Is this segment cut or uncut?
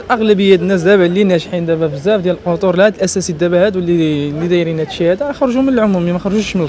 uncut